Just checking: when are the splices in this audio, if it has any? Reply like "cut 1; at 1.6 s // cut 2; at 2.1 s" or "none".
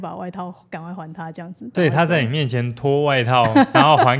cut 1; at 1.7 s